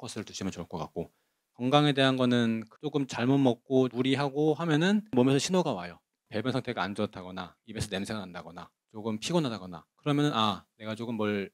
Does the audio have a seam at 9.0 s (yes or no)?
no